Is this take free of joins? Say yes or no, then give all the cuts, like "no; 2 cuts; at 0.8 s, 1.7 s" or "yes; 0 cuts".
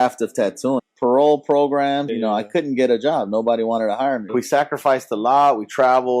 no; 3 cuts; at 0.9 s, 2.1 s, 4.3 s